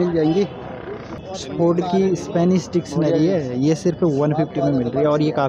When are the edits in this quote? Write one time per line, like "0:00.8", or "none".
0:01.4